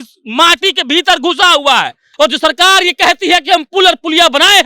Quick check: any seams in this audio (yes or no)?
yes